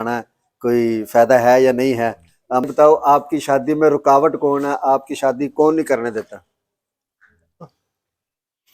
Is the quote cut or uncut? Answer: cut